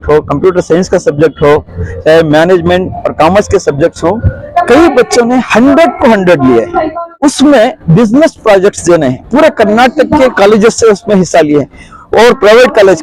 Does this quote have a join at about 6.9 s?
yes; 1 cut; at 6.9 s

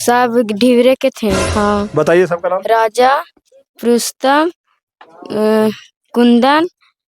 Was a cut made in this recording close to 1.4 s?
yes; 1 cut; at 1.4 s

